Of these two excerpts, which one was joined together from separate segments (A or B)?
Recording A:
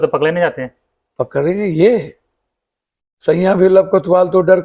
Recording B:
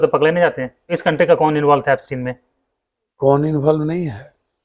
B